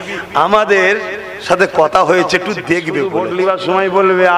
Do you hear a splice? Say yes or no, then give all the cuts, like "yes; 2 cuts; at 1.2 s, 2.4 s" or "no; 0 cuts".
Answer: yes; 1 cut; at 3.1 s